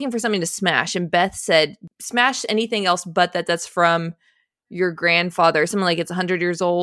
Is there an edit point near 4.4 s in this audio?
no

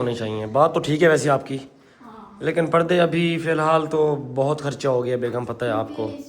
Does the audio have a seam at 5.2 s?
no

